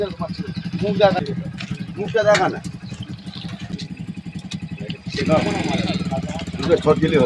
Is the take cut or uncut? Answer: cut